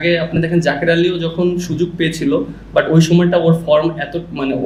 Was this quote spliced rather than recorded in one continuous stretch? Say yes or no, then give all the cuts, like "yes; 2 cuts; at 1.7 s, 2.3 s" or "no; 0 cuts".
no; 0 cuts